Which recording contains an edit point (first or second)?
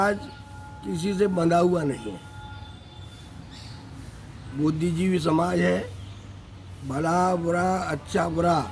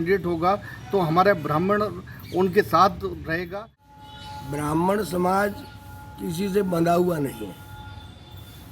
second